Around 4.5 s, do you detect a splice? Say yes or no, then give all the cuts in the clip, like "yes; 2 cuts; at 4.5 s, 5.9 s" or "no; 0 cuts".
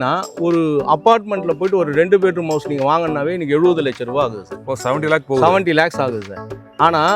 no; 0 cuts